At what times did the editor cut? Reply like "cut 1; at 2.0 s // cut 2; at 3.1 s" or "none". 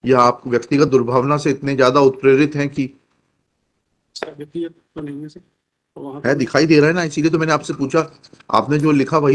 none